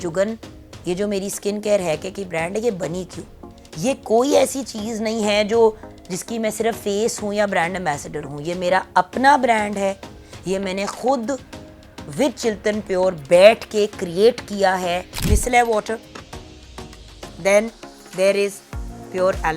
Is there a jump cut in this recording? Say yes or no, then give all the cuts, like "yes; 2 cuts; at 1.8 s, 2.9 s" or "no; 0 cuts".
yes; 1 cut; at 15.2 s